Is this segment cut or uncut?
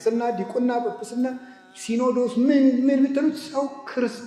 uncut